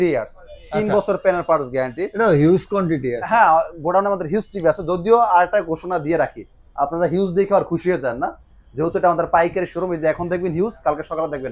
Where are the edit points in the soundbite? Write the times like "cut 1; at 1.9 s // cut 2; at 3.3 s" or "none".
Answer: none